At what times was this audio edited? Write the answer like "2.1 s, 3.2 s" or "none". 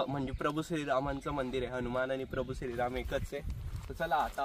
none